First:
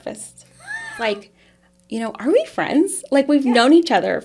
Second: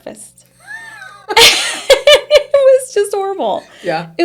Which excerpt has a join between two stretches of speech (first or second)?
first